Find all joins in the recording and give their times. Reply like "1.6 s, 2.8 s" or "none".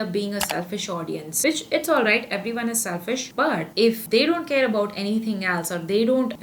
none